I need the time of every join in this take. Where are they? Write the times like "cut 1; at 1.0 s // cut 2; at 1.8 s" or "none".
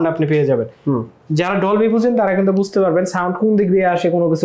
none